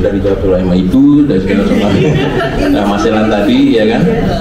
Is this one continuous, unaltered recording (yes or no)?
yes